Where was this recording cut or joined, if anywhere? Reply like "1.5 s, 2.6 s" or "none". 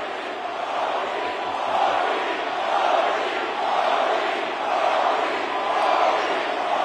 none